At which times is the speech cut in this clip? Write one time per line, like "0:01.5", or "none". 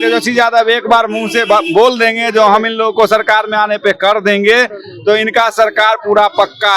none